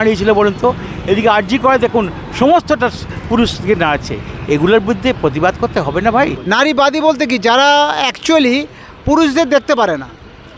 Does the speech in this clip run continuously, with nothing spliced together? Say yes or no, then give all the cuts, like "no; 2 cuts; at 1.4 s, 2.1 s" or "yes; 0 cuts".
no; 1 cut; at 6.4 s